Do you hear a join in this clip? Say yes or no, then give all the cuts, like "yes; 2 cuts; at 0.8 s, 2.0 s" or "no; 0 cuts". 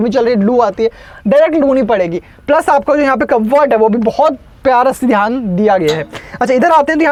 no; 0 cuts